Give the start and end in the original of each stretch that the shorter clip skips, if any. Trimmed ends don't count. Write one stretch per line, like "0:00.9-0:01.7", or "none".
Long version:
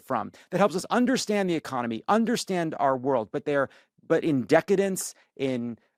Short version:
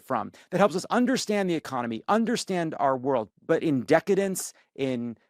0:03.3-0:03.9